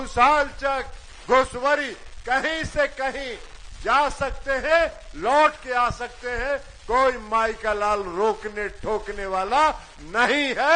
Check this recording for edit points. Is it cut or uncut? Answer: uncut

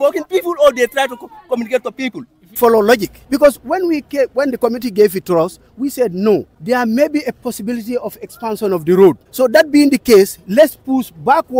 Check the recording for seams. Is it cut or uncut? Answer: cut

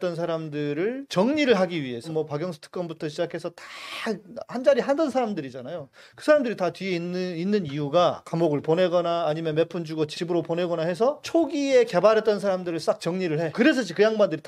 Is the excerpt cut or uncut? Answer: cut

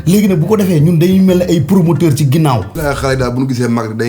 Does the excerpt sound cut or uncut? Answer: cut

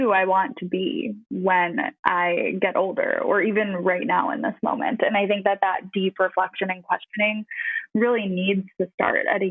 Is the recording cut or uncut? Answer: cut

